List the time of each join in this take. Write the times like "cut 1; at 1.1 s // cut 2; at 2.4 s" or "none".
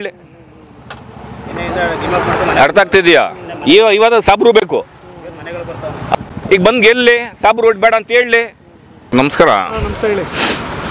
cut 1; at 6.1 s // cut 2; at 9.1 s